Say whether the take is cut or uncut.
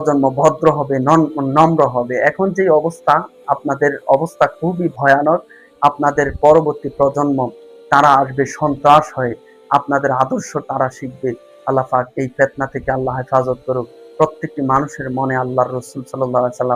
uncut